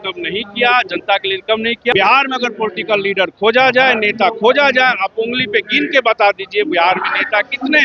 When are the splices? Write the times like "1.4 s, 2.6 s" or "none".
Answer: 1.9 s

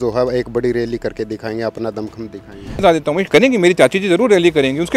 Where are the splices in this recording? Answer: 2.8 s

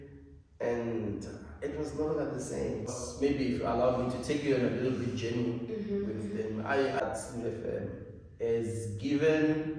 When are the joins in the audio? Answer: 3.0 s, 7.0 s

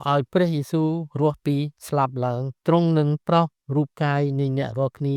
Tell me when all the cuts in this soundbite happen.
2.0 s

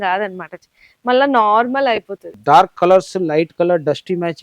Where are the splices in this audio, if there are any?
2.3 s

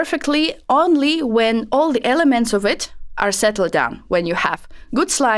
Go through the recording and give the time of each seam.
none

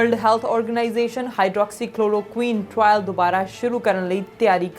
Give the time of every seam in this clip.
none

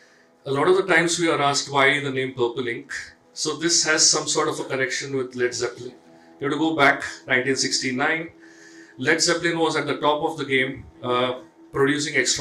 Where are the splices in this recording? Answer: none

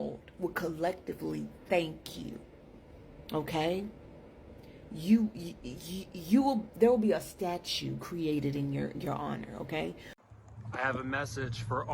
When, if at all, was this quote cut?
10.1 s

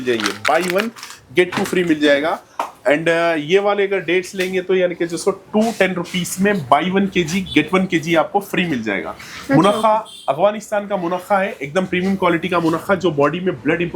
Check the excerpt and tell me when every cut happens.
none

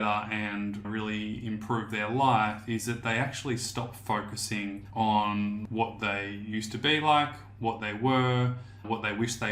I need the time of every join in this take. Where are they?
4.8 s, 5.6 s

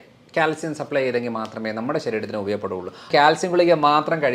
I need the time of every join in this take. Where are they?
3.1 s

